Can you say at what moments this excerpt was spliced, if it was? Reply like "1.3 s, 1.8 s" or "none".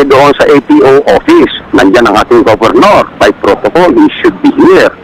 none